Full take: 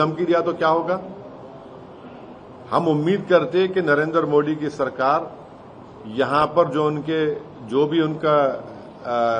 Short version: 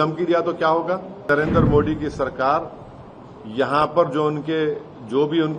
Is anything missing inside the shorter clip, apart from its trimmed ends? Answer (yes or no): yes